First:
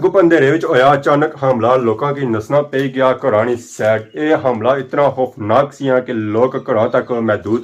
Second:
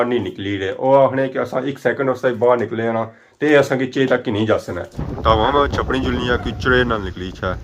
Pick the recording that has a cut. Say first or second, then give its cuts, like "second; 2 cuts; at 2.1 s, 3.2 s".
second; 1 cut; at 5.1 s